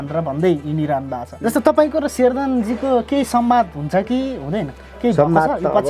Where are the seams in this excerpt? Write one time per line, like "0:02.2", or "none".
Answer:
0:01.2

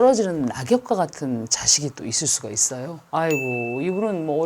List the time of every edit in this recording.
0:03.0

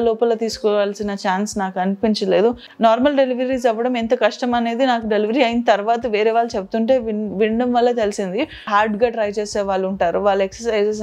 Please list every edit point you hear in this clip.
0:02.7
0:08.7

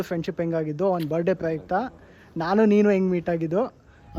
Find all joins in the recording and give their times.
none

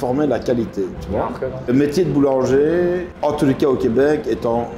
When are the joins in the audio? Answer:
0:01.7
0:03.1

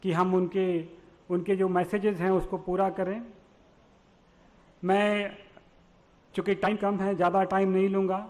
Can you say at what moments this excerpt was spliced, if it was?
0:06.7

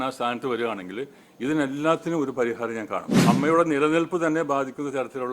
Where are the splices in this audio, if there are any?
0:03.1

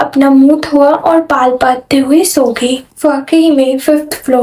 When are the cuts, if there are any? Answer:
0:02.9

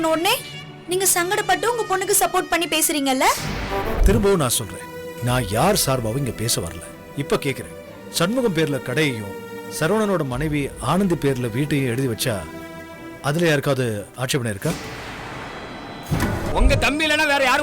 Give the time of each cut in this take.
0:04.0
0:16.5

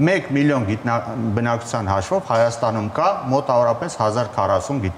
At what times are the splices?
none

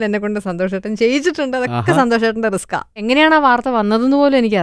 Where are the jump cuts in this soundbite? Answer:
0:02.8

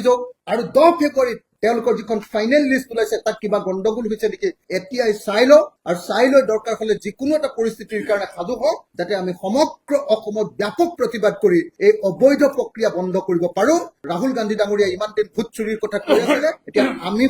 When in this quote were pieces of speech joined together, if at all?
none

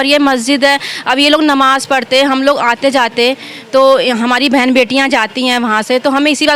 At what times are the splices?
none

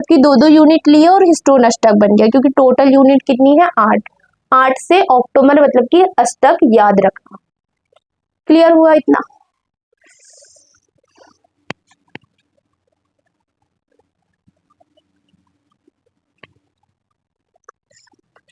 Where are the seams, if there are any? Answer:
none

